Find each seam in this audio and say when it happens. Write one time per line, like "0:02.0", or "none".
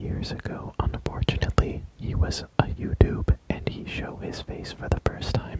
none